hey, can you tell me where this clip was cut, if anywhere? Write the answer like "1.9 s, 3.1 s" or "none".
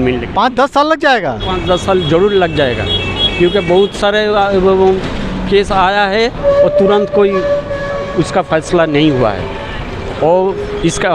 none

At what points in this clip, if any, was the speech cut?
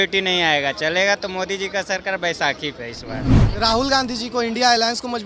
3.3 s

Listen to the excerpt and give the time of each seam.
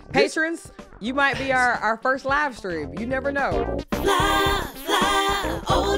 3.5 s

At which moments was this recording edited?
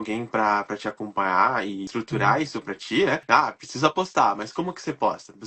1.9 s, 3.2 s

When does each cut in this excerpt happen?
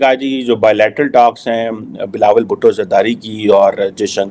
none

